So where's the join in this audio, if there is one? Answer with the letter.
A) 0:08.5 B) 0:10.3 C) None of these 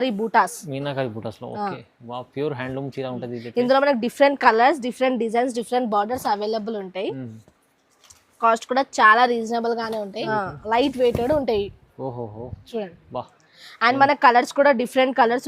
B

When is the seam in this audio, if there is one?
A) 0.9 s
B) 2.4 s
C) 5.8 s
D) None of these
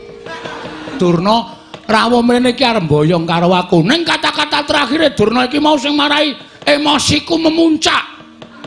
A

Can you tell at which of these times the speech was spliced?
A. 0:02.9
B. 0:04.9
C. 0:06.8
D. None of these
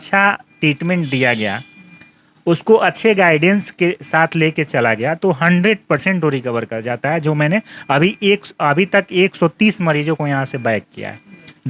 D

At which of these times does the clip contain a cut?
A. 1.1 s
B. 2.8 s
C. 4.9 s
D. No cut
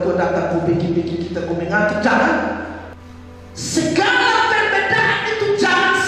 B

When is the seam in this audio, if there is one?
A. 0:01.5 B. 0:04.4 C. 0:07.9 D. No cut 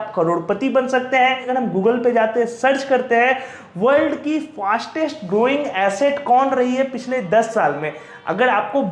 A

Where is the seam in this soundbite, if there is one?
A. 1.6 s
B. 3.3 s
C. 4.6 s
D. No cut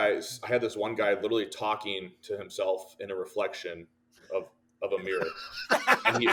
D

